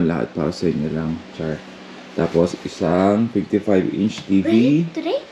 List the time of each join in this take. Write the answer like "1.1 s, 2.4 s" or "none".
none